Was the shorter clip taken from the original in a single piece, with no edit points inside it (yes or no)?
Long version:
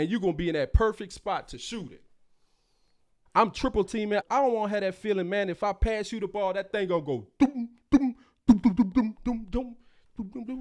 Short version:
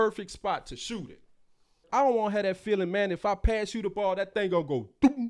no